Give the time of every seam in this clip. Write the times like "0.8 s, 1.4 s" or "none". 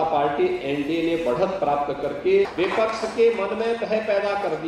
2.5 s